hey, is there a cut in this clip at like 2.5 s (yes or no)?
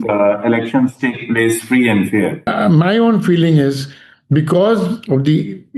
yes